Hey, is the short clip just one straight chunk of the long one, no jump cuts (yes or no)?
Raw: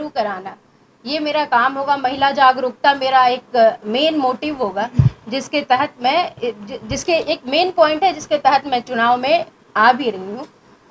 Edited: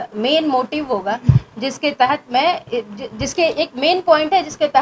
yes